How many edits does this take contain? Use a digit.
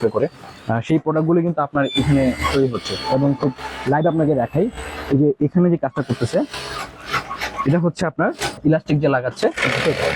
1